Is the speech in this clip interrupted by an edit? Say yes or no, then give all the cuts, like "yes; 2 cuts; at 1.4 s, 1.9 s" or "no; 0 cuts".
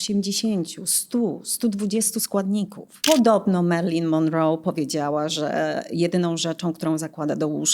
yes; 1 cut; at 3.0 s